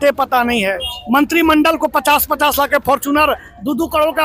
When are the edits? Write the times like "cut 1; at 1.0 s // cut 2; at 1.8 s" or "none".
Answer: none